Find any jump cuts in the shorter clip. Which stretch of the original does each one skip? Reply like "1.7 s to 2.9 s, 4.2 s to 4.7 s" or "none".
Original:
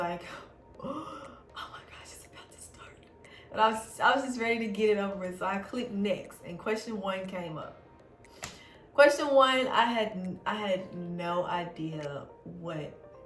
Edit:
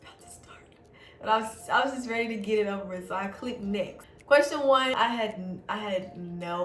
6.4 s to 8.7 s, 9.6 s to 9.7 s

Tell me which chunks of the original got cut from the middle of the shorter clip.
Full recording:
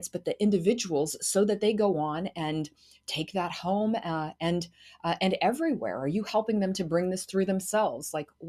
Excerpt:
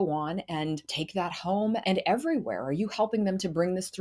2.8 s to 3.1 s, 4.0 s to 5.2 s

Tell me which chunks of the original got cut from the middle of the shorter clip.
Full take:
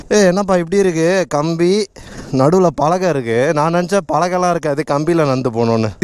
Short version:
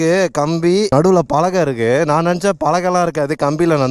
1.9 s to 2.4 s

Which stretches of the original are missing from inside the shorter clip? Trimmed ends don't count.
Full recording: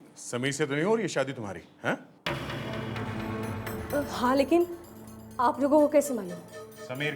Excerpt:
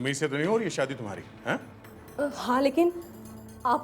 2.3 s to 3.7 s

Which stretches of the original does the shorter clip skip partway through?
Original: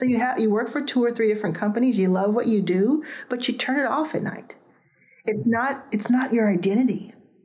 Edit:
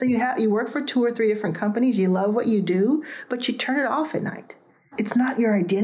4.9 s to 5.8 s

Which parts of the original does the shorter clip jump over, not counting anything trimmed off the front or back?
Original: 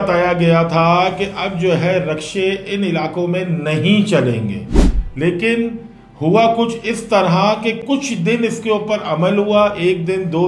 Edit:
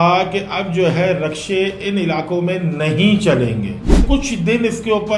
4.9 s to 7.9 s

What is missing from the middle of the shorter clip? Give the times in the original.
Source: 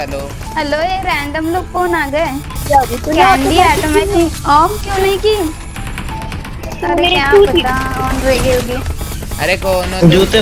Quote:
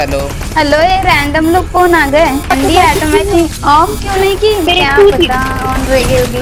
2.5 s to 3.3 s, 5.5 s to 7.0 s

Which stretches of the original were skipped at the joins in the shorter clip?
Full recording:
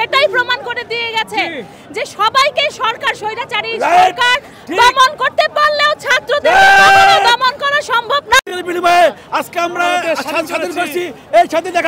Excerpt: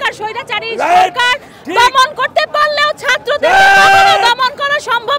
none

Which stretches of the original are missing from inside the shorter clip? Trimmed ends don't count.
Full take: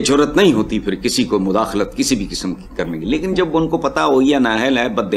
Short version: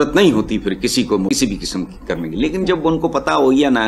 1.5 s to 2.0 s

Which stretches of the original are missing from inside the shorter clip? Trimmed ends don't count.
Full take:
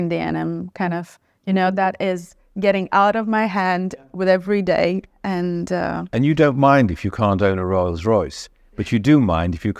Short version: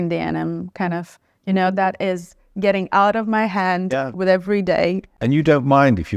5.1 s to 6.0 s

